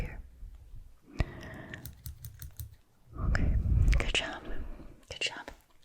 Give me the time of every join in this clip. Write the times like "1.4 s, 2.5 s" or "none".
none